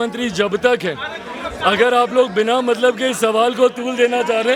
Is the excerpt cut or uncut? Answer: uncut